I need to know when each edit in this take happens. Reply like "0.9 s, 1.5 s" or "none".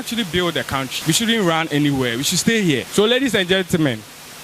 0.9 s, 2.9 s